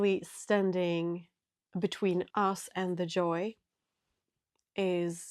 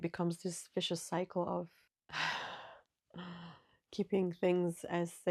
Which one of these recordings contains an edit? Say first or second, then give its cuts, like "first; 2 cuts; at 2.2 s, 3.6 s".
first; 1 cut; at 2.3 s